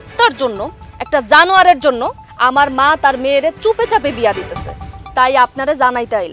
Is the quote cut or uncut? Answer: cut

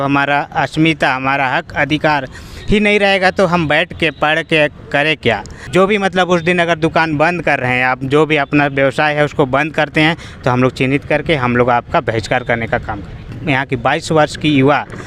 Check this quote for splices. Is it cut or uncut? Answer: cut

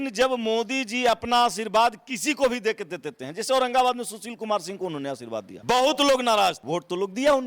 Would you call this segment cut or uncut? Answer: cut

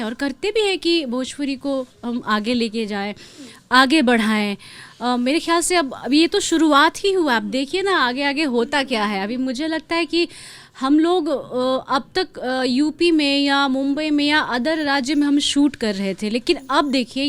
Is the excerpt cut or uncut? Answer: uncut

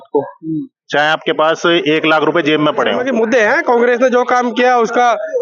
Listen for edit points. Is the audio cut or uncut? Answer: cut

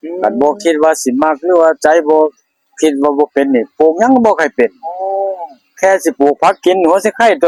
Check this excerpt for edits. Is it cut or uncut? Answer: uncut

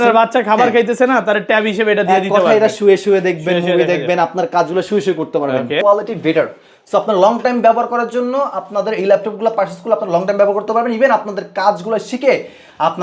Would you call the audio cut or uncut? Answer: cut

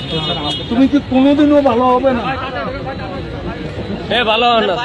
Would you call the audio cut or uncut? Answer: uncut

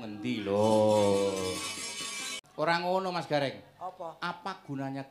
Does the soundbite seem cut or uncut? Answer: cut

